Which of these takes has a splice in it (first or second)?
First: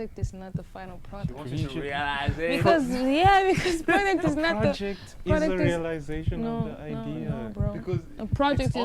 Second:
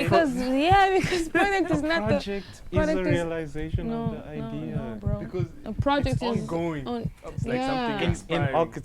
second